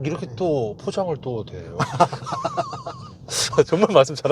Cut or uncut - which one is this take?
uncut